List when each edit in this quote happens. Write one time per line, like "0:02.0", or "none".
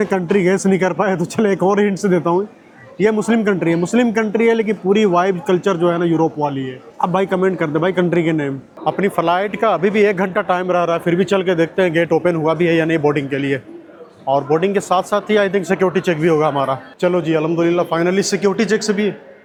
none